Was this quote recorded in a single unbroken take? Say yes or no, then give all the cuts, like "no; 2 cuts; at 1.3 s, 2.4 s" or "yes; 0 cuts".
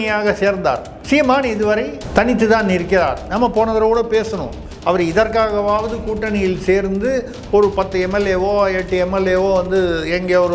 no; 2 cuts; at 0.9 s, 2.0 s